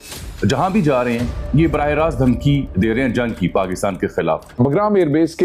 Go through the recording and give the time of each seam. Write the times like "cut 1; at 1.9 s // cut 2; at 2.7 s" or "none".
cut 1; at 4.6 s